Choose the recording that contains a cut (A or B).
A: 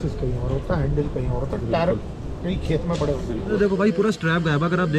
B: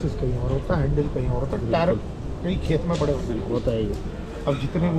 A